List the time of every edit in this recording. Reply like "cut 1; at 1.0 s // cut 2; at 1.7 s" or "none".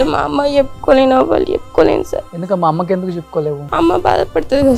cut 1; at 2.3 s // cut 2; at 3.6 s